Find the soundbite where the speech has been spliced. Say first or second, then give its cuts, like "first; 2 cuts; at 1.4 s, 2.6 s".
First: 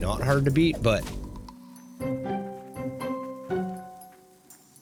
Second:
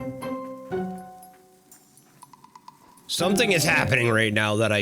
second; 1 cut; at 3.0 s